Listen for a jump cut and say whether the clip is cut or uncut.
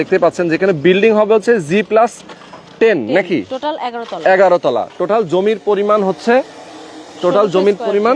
uncut